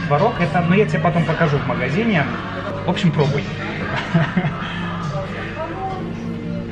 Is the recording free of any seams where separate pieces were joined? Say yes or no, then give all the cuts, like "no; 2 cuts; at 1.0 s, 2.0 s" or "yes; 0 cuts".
yes; 0 cuts